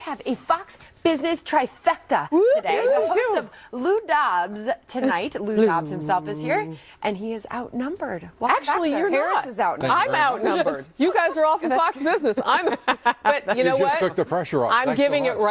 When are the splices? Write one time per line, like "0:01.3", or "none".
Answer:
0:06.8